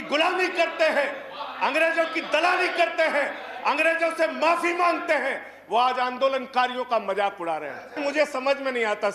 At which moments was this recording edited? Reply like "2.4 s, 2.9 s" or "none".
8.0 s